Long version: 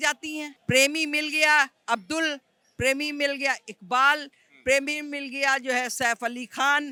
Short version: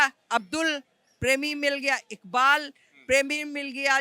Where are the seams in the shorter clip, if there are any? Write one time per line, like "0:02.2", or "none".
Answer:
none

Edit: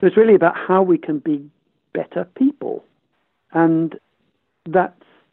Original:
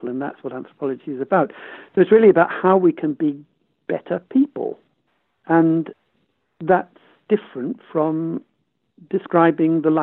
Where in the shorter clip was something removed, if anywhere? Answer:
none

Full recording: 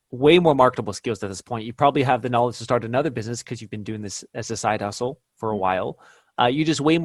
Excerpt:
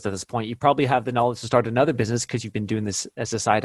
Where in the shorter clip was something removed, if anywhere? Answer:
none

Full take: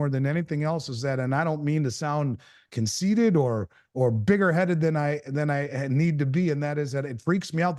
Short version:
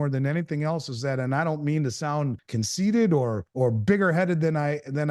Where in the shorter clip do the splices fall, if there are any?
0:02.4
0:03.4

